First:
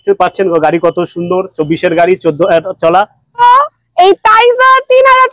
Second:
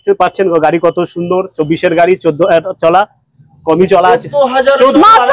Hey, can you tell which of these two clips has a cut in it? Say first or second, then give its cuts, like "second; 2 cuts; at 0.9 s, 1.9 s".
first; 1 cut; at 3.4 s